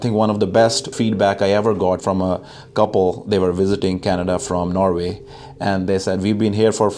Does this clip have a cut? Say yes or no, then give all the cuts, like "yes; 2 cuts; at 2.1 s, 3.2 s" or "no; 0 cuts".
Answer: yes; 2 cuts; at 0.9 s, 2.0 s